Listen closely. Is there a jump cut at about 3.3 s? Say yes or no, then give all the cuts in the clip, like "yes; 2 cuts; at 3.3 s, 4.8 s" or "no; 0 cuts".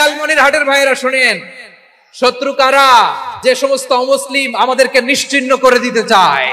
yes; 1 cut; at 3.3 s